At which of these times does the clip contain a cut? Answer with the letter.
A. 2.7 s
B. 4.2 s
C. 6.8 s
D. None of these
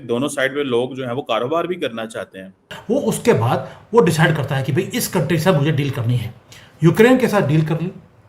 A